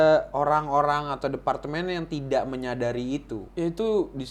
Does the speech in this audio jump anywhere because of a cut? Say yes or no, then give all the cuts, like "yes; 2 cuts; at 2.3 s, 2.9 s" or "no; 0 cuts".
yes; 1 cut; at 3.4 s